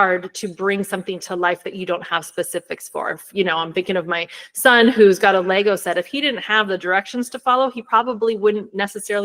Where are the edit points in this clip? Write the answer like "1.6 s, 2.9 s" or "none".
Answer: none